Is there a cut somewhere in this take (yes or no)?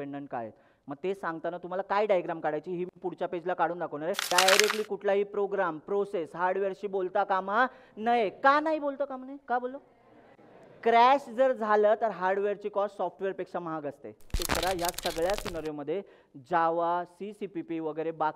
yes